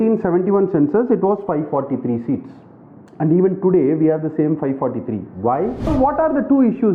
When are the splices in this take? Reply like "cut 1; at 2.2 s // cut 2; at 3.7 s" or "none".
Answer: cut 1; at 5.9 s